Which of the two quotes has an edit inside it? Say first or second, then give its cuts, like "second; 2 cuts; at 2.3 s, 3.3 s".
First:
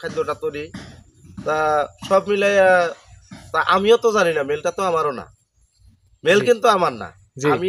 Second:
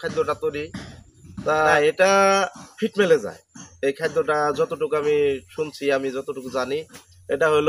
second; 1 cut; at 1.7 s